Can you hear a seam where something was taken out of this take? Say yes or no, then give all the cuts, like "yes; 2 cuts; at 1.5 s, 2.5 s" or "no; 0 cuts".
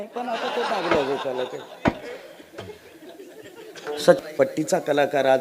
yes; 1 cut; at 4.5 s